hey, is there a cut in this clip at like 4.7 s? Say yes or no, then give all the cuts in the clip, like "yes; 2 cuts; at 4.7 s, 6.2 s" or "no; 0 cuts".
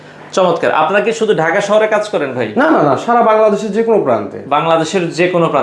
no; 0 cuts